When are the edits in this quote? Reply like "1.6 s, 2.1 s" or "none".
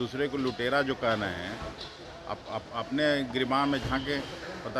none